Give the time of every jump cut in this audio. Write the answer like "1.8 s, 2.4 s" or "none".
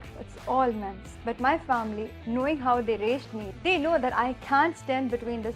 3.4 s

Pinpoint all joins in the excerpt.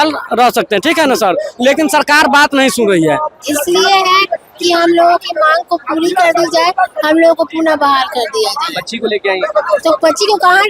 3.3 s

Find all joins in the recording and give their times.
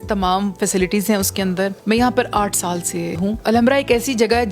1.8 s, 3.3 s

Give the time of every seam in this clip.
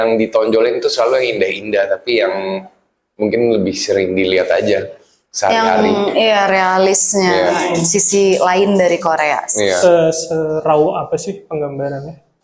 none

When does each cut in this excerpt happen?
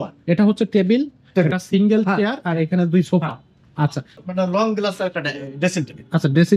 4.2 s

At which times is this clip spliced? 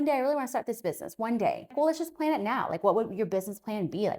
1.7 s

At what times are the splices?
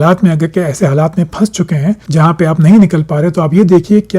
2.0 s

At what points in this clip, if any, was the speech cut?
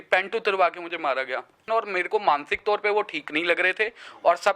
1.7 s

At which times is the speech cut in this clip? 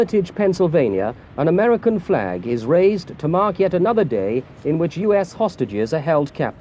none

